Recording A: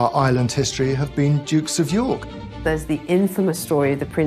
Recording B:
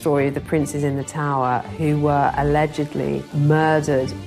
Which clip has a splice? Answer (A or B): A